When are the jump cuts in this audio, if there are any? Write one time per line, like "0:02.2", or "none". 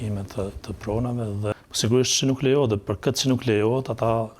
0:01.5